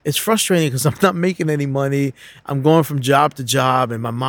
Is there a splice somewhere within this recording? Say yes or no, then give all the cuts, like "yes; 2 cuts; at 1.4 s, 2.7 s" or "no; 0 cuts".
no; 0 cuts